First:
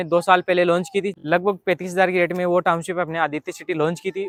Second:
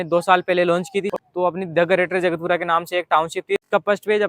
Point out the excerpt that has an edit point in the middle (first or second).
second